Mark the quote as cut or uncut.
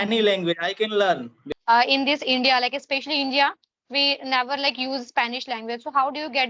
cut